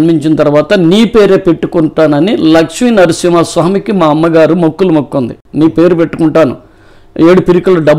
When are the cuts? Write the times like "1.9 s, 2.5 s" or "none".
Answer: none

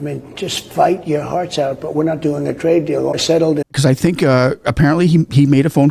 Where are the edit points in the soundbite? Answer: 3.2 s

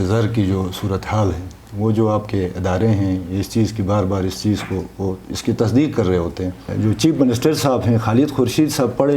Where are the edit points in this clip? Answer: 6.6 s

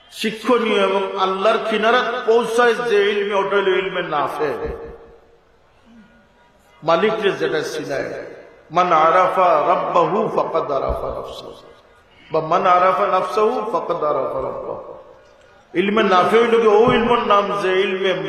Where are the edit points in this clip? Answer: none

